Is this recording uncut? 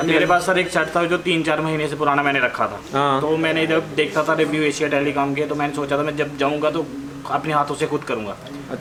yes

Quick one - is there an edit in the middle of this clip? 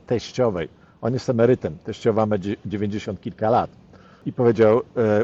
no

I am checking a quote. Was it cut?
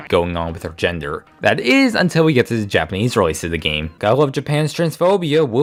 no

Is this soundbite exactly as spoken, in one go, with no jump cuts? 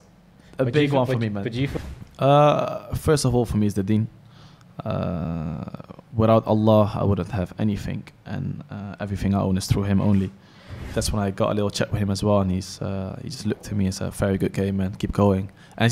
no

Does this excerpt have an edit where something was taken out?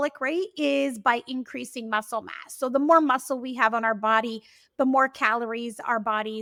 no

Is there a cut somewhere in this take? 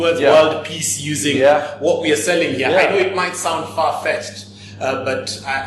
no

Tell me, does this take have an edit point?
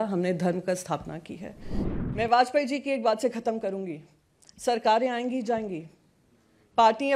yes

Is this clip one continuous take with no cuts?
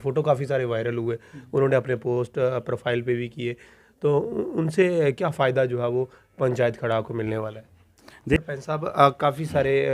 no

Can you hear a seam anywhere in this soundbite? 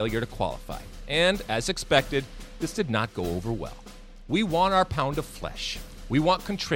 no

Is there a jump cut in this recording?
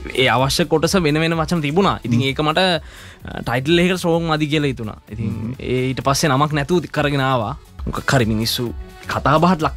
yes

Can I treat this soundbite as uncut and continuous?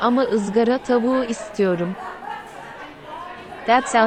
yes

